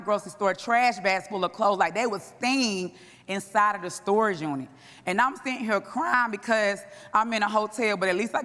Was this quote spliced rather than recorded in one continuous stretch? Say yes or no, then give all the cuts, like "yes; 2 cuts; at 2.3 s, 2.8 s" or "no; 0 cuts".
no; 0 cuts